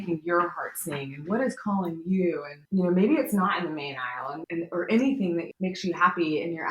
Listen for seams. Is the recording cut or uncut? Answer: cut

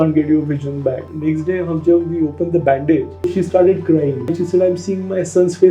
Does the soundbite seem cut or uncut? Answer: cut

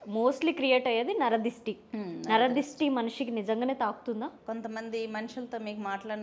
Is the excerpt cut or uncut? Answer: cut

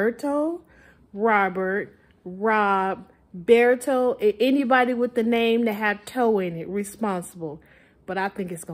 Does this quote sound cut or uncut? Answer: uncut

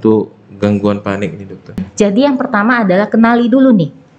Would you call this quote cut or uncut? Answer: cut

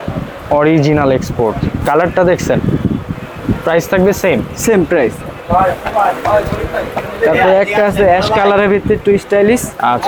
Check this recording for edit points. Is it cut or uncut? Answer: uncut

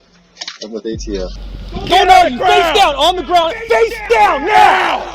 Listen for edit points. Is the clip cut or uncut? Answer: cut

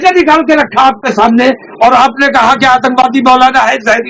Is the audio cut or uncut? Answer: uncut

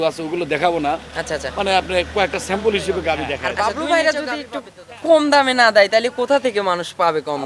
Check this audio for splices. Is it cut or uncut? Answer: cut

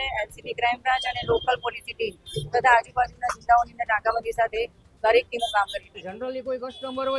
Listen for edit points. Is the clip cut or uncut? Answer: cut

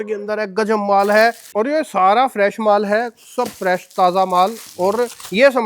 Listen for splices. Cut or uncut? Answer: cut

